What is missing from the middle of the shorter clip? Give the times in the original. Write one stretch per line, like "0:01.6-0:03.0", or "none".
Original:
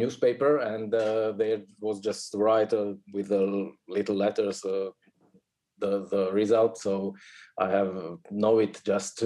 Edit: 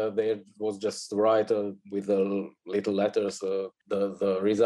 0:05.0-0:05.7